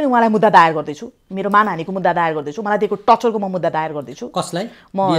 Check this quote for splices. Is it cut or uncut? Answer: uncut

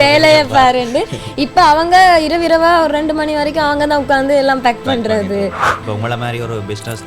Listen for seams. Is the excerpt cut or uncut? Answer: cut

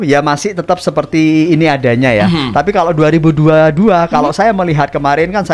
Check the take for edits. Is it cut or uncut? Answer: uncut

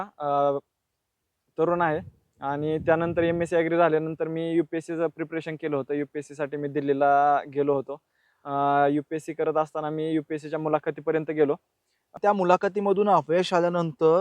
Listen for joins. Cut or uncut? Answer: cut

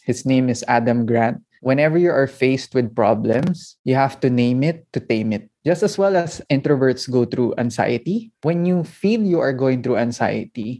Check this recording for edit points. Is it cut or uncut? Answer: cut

